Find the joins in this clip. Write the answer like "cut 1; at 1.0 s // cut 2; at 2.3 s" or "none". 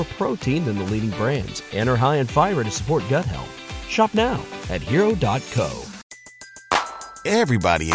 cut 1; at 5.9 s

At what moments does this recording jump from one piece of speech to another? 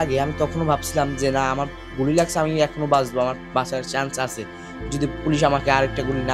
none

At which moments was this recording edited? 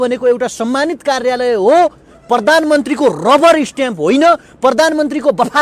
none

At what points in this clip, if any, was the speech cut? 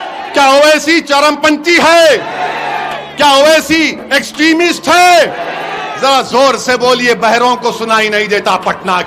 none

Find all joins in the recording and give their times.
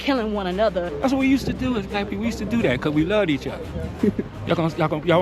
cut 1; at 0.9 s

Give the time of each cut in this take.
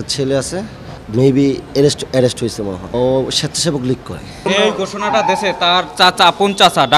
cut 1; at 1.0 s // cut 2; at 2.8 s // cut 3; at 4.3 s

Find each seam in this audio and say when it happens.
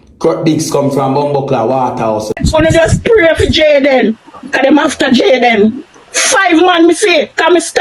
cut 1; at 2.3 s

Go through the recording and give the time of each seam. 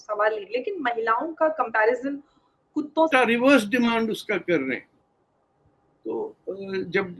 cut 1; at 3.1 s

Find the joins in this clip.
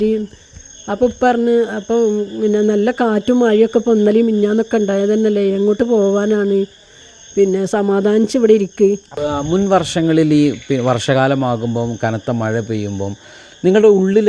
cut 1; at 9.1 s

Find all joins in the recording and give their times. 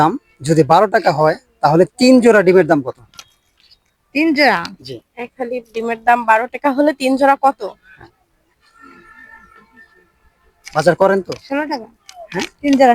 none

